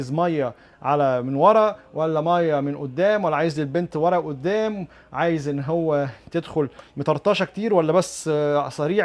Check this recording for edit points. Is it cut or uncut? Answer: uncut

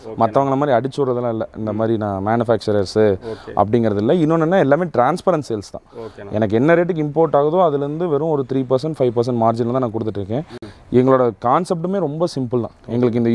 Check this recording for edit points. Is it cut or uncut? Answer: uncut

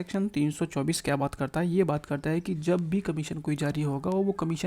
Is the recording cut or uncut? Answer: uncut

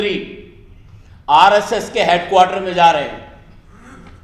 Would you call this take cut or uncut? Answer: uncut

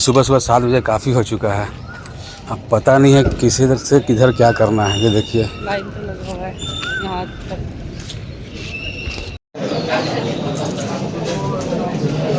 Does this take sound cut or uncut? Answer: uncut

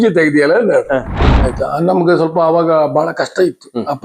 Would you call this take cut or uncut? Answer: cut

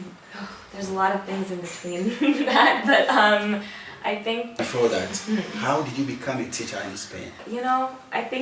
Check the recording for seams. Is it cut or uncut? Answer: cut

